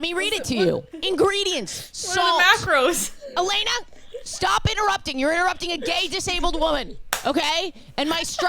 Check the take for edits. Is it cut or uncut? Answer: cut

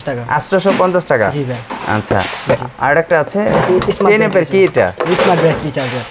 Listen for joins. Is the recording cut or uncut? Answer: uncut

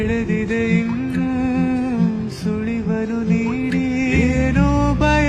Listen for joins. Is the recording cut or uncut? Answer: uncut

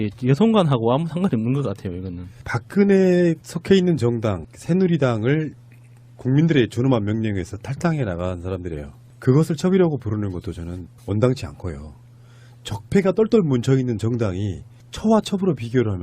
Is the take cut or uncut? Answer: cut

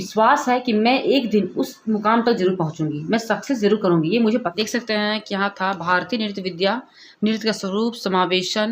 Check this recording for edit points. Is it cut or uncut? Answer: cut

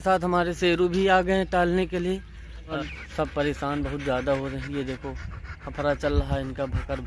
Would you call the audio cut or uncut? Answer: cut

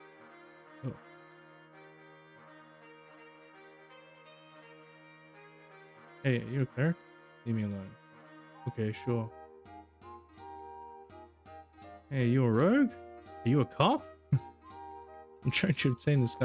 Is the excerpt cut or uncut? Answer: uncut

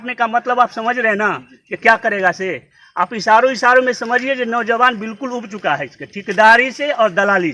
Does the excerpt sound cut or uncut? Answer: uncut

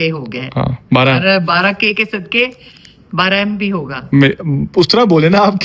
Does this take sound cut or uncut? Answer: uncut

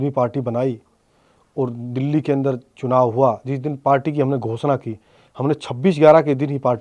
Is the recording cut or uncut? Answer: uncut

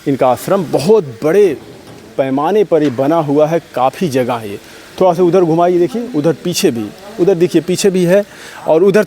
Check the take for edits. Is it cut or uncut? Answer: uncut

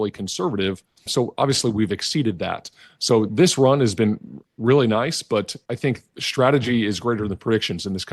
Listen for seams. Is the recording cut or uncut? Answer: cut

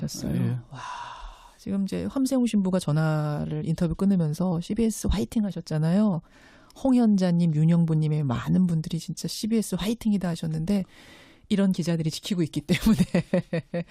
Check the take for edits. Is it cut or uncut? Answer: cut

